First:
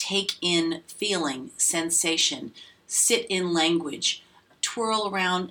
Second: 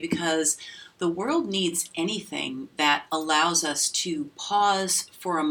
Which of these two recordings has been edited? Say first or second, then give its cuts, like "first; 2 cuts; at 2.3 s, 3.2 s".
first; 1 cut; at 4.5 s